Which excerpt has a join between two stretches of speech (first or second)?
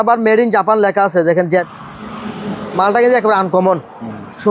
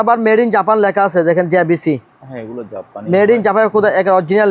first